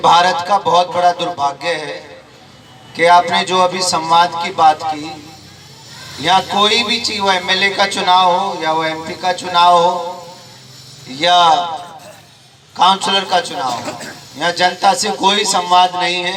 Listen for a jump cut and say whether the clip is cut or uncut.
uncut